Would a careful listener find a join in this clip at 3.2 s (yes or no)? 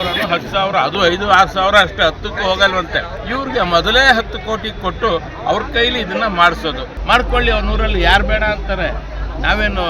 yes